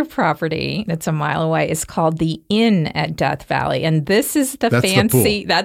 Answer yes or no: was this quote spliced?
no